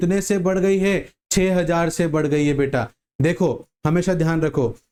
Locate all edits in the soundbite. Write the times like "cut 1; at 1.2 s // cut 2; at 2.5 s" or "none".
none